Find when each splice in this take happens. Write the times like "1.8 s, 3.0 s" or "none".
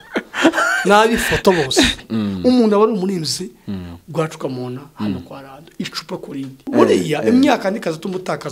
2.0 s, 6.7 s